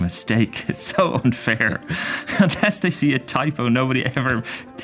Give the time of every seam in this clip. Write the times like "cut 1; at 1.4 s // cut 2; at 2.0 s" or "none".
none